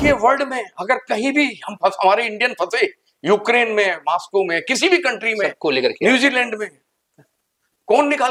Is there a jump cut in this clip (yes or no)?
no